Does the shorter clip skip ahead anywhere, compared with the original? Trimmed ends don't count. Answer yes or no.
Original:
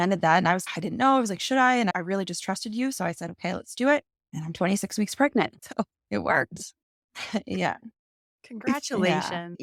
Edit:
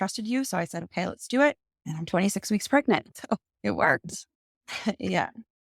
no